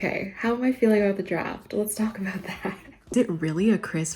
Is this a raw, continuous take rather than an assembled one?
no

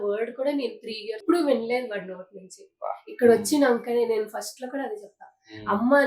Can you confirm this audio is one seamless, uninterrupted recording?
no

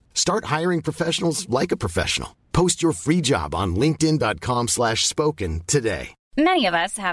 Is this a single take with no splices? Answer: no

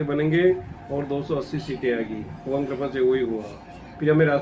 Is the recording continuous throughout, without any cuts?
yes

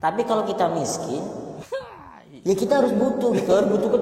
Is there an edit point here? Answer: no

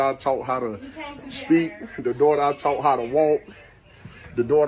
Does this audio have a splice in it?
no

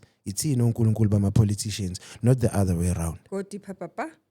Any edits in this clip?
no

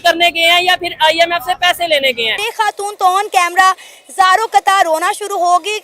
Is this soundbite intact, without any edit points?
no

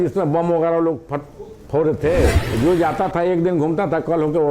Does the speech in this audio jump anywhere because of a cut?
yes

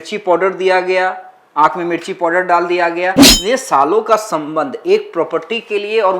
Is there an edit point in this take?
yes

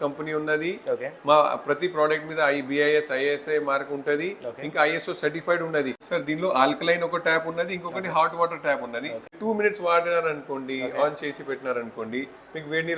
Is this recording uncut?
no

